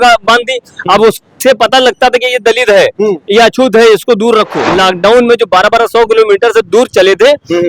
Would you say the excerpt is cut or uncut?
cut